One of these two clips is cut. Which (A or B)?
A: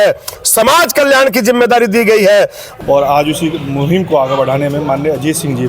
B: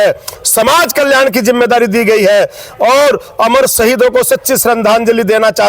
A